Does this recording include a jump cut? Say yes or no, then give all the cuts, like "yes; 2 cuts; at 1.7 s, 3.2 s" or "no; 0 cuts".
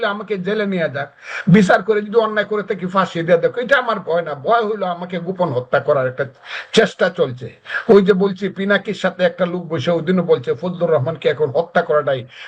no; 0 cuts